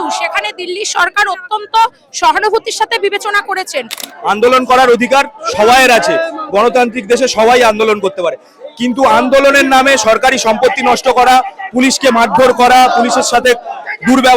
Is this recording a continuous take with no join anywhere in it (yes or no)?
no